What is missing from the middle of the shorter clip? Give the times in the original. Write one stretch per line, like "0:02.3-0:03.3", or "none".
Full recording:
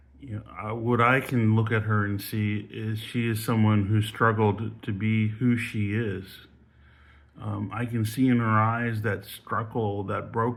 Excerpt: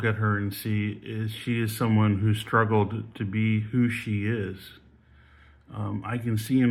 none